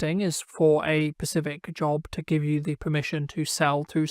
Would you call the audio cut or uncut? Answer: uncut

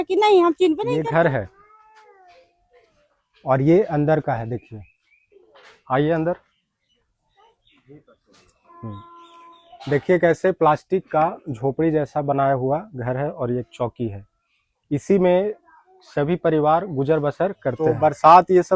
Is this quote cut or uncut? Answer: cut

